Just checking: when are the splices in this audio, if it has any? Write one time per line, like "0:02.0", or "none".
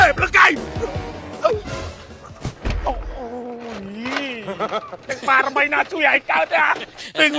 none